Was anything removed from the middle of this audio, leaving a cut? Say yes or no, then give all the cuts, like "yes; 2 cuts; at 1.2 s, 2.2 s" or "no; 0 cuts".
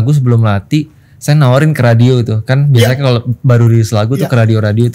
no; 0 cuts